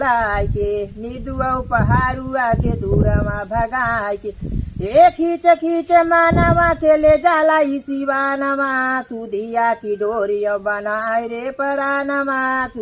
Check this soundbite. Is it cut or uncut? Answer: uncut